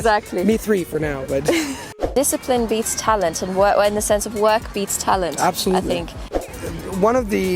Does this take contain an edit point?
yes; 2 cuts; at 1.9 s, 6.3 s

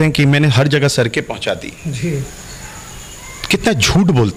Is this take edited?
no; 0 cuts

